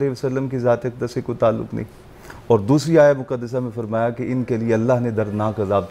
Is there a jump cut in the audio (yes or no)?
no